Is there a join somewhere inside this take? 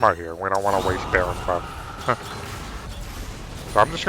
yes; 1 cut; at 2.9 s

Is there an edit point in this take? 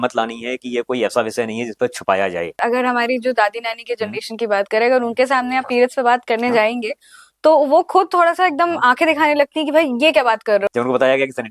yes; 2 cuts; at 2.6 s, 10.7 s

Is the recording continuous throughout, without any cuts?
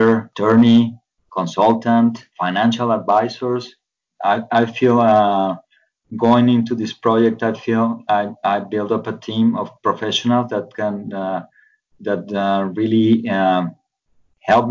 yes; 0 cuts

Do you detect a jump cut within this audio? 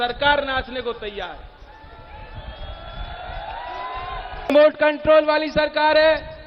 yes; 1 cut; at 4.5 s

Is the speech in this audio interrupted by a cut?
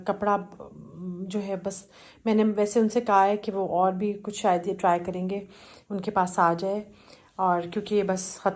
no; 0 cuts

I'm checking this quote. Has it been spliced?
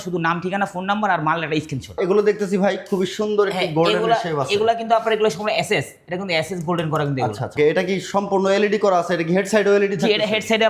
yes; 2 cuts; at 1.9 s, 7.5 s

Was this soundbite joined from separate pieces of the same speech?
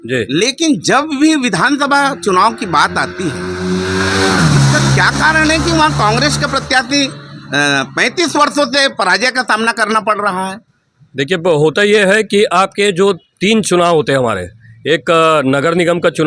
no; 0 cuts

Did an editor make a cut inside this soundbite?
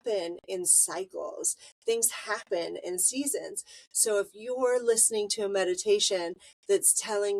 no; 0 cuts

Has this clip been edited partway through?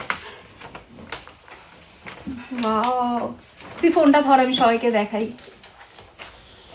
no; 0 cuts

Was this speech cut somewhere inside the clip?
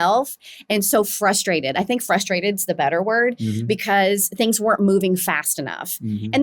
no; 0 cuts

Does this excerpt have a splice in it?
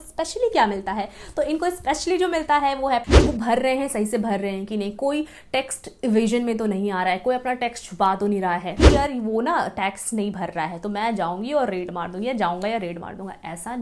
yes; 2 cuts; at 3.1 s, 8.7 s

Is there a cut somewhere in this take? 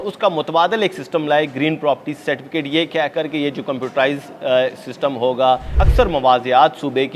yes; 1 cut; at 5.7 s

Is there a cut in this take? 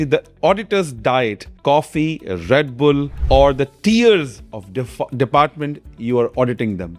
yes; 2 cuts; at 1.5 s, 3.1 s

